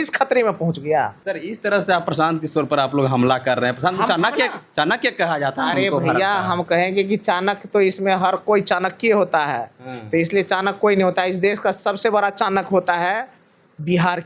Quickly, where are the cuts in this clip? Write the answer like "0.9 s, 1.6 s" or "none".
1.2 s